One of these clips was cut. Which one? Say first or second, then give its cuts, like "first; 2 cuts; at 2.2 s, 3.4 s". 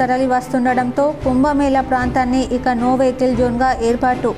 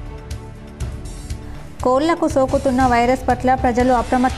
second; 1 cut; at 1.4 s